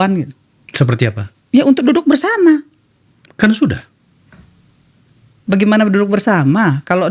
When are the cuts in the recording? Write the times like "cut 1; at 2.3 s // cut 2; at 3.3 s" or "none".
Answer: none